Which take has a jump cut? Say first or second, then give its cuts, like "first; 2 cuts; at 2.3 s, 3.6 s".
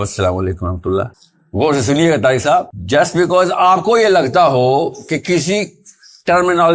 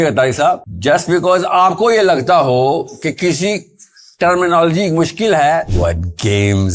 second; 1 cut; at 5.7 s